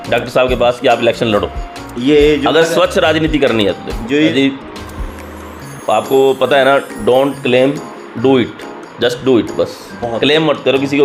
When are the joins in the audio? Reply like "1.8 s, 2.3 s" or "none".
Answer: 4.2 s